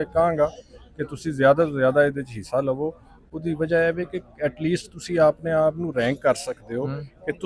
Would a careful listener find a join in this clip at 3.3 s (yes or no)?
no